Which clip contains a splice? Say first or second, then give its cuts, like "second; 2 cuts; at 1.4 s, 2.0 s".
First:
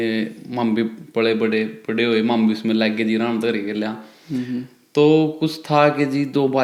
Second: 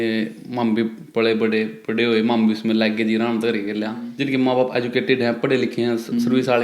second; 1 cut; at 4.1 s